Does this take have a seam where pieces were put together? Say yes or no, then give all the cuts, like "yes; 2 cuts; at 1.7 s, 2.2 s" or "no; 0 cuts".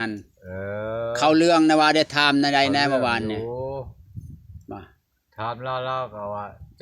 no; 0 cuts